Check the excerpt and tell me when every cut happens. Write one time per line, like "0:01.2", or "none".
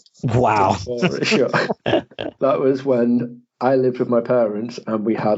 0:02.3